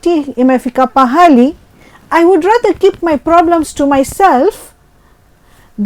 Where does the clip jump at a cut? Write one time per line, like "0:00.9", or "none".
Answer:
none